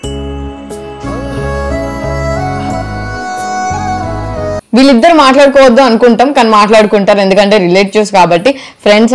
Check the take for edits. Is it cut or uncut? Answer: uncut